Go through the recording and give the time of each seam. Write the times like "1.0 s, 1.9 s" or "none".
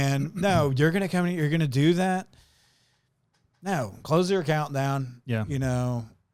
none